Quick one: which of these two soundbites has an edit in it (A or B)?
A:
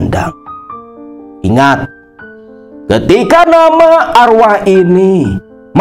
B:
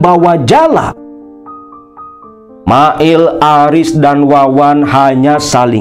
B